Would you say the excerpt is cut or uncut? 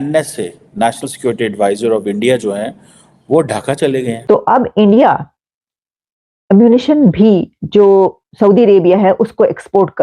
cut